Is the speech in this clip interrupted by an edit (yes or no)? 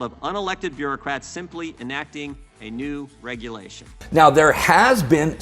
yes